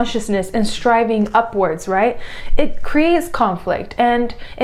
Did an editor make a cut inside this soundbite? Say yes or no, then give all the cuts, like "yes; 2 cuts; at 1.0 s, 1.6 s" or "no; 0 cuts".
no; 0 cuts